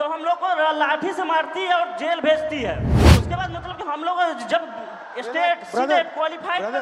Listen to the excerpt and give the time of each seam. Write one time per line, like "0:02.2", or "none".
0:03.0